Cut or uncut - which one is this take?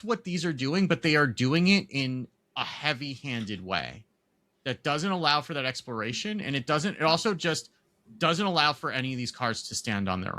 uncut